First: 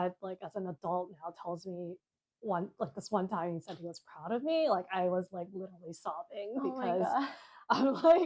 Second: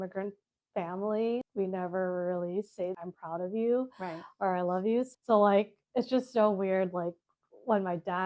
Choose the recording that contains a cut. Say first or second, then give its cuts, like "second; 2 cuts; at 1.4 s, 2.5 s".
second; 3 cuts; at 1.5 s, 2.9 s, 5.1 s